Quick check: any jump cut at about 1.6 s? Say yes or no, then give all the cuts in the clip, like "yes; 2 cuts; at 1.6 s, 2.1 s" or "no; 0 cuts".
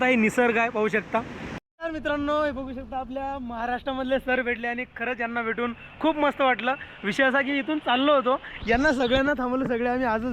yes; 1 cut; at 1.6 s